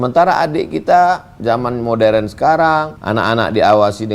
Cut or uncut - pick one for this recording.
cut